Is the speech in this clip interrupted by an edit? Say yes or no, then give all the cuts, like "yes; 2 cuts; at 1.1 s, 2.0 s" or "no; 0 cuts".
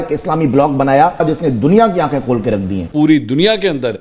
yes; 2 cuts; at 1.2 s, 2.9 s